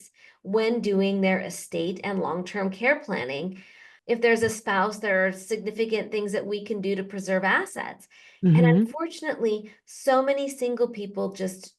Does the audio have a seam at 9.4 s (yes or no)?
no